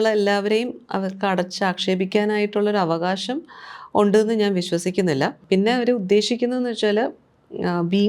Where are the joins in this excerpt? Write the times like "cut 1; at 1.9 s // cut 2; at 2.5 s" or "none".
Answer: cut 1; at 5.4 s